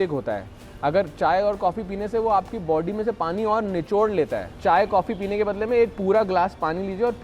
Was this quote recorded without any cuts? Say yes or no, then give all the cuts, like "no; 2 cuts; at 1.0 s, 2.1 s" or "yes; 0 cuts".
no; 1 cut; at 4.5 s